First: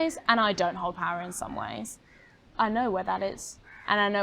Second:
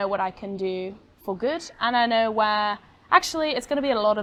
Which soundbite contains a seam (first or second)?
first